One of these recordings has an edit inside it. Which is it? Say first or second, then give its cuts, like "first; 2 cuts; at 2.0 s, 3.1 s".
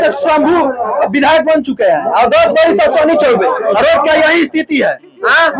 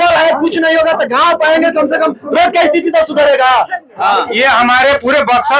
second; 1 cut; at 4.0 s